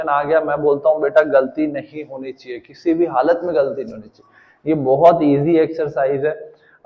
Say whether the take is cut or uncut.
uncut